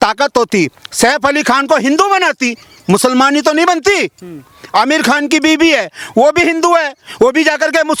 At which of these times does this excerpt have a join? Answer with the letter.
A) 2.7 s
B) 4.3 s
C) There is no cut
C